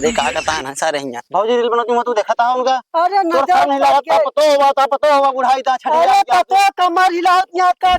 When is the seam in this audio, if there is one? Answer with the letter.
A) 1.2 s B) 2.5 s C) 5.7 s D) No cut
A